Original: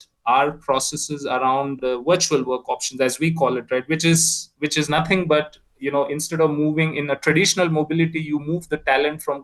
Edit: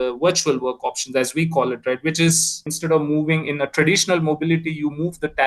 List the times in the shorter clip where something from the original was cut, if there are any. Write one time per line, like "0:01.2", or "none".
0:02.7